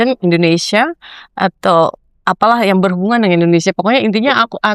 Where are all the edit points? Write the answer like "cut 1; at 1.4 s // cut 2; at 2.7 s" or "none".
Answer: none